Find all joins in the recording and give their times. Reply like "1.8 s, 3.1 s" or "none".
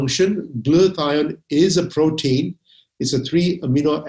none